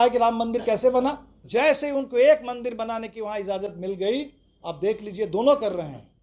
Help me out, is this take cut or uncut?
cut